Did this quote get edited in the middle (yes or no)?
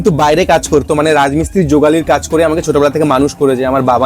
no